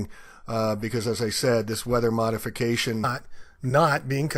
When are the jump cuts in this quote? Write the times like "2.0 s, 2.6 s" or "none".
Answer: none